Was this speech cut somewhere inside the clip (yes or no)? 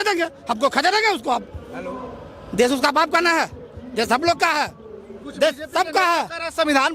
no